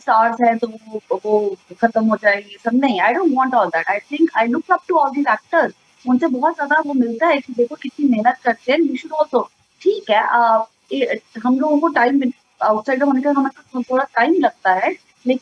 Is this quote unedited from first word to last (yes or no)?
yes